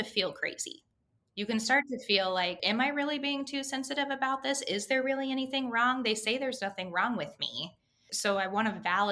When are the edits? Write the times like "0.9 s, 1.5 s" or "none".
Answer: 1.1 s, 2.6 s